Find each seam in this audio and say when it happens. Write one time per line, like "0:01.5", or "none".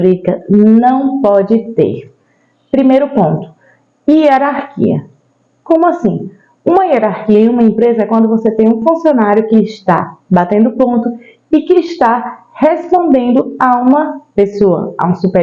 none